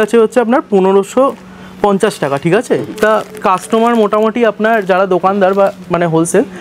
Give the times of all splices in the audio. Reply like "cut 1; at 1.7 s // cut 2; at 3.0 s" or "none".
none